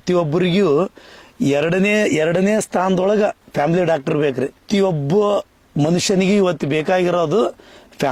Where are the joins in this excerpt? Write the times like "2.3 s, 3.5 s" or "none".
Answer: none